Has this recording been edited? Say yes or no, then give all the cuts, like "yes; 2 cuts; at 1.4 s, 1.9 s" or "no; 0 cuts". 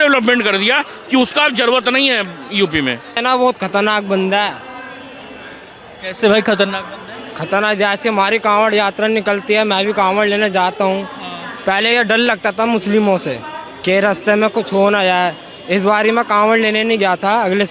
yes; 1 cut; at 3.2 s